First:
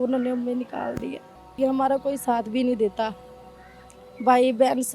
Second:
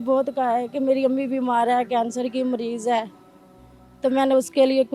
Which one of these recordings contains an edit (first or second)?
first